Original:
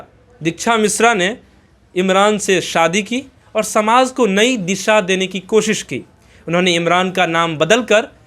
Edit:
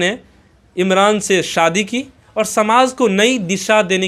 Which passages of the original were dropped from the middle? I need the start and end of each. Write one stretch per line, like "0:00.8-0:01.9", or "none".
none